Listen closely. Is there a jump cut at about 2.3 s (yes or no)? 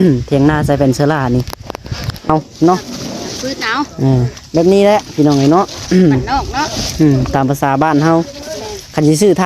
yes